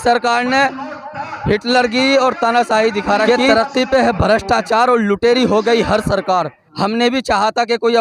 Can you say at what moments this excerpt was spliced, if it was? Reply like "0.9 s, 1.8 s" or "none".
3.3 s, 6.6 s